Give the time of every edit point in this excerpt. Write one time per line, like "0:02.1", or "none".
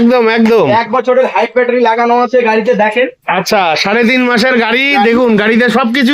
none